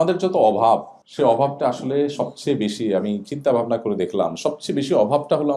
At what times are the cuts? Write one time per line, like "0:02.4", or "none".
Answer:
0:01.0

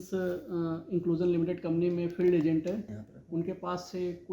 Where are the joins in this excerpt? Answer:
0:02.9

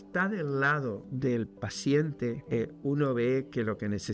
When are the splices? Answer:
0:01.1
0:02.4

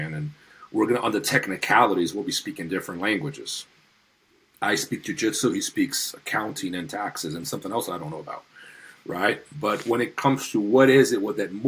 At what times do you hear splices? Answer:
none

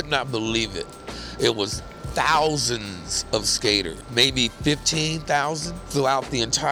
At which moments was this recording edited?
0:04.0
0:05.8

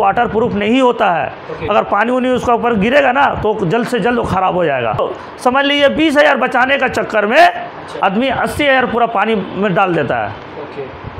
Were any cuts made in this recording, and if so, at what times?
0:05.0

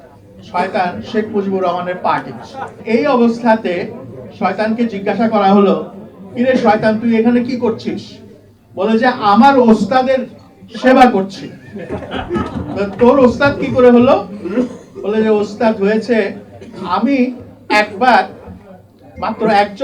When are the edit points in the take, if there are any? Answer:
0:02.7

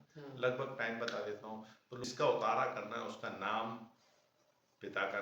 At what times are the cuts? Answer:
0:02.0

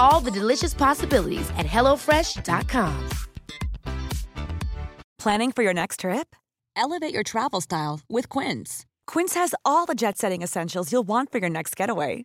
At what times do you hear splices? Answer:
0:05.1

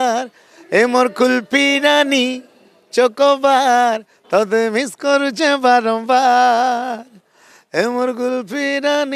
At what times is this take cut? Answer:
none

